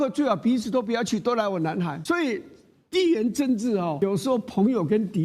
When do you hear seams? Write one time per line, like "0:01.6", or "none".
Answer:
0:02.0
0:04.0